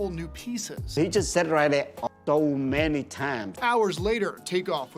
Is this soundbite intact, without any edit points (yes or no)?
no